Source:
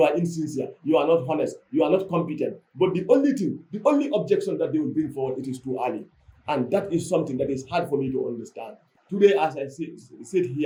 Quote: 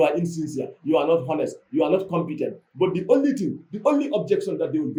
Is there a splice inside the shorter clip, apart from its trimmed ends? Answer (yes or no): no